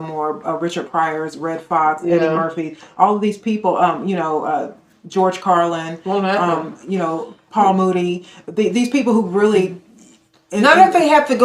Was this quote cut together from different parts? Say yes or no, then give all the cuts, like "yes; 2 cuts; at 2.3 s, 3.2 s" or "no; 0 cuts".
no; 0 cuts